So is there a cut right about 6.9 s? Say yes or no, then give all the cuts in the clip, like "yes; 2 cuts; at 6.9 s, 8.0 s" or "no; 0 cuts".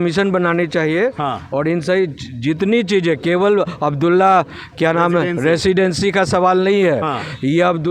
no; 0 cuts